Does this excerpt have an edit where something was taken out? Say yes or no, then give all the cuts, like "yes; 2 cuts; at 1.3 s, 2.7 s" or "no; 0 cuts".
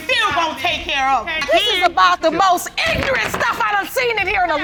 no; 0 cuts